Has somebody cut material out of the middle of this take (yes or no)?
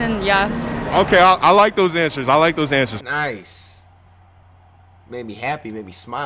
no